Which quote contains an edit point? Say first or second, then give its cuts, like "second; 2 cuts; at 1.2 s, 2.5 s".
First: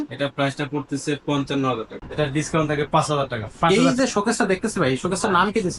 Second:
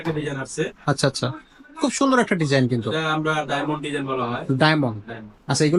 first; 2 cuts; at 2.0 s, 3.7 s